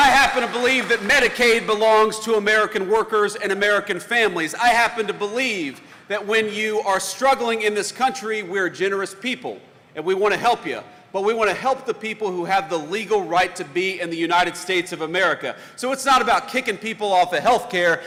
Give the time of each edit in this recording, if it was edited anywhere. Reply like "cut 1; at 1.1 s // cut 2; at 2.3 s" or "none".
none